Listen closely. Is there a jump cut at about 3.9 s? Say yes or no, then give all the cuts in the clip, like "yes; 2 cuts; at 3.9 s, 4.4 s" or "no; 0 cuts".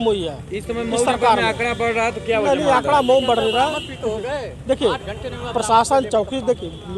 no; 0 cuts